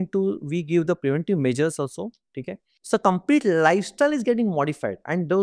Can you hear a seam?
yes; 1 cut; at 2.7 s

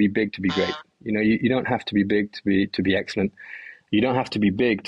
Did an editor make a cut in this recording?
no; 0 cuts

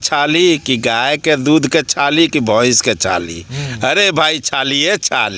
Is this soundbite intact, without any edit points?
yes; 0 cuts

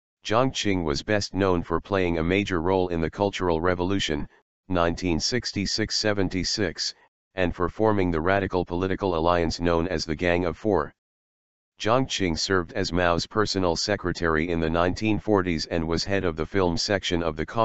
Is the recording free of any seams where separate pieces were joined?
yes; 0 cuts

